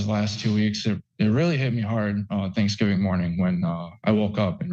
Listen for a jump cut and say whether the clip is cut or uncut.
uncut